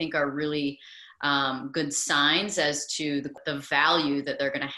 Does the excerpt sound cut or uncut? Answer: cut